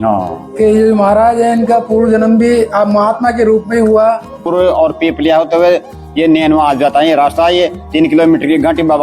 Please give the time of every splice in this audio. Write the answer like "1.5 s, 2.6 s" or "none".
4.3 s